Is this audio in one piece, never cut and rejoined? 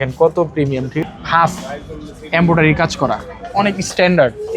no; 1 cut; at 1.0 s

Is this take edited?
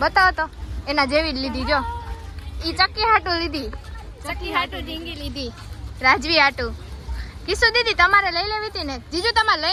no; 0 cuts

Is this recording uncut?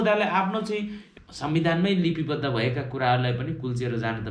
no; 1 cut; at 1.0 s

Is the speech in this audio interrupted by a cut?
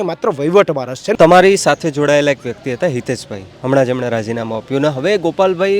yes; 1 cut; at 1.1 s

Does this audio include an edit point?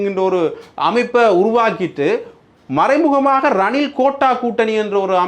no; 0 cuts

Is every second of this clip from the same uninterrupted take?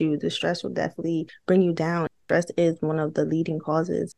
yes; 0 cuts

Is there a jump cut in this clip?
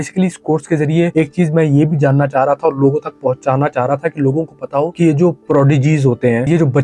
no; 0 cuts

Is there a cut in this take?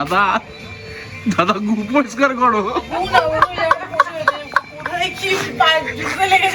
no; 0 cuts

